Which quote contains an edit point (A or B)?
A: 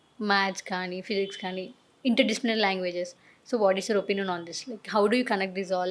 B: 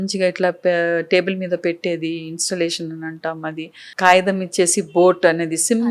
B